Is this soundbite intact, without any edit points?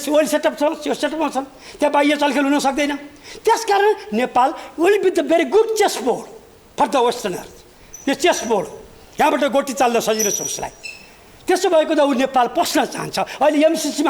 yes; 0 cuts

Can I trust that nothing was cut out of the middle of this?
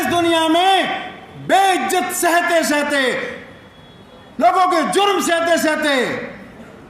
yes; 0 cuts

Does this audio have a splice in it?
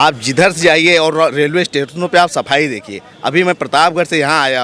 no; 0 cuts

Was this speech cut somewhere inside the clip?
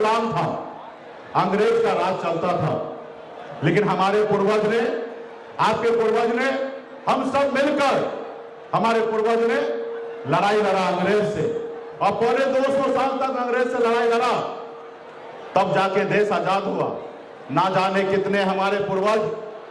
no; 0 cuts

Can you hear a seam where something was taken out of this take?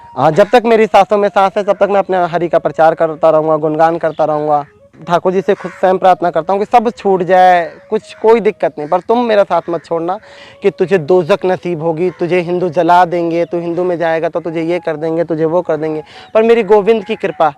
yes; 2 cuts; at 5.0 s, 10.4 s

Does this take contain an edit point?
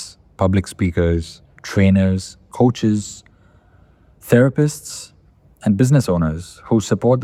no; 0 cuts

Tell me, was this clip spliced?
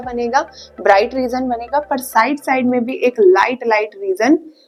no; 0 cuts

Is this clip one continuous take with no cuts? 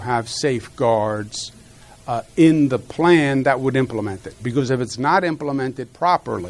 yes; 0 cuts

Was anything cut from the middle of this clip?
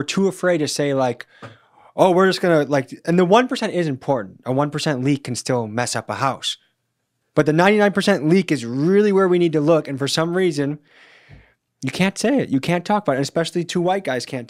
no; 0 cuts

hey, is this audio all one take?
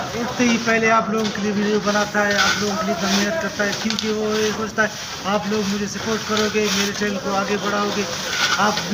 yes; 0 cuts

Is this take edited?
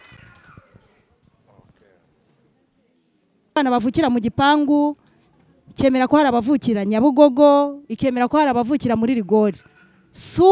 yes; 1 cut; at 3.6 s

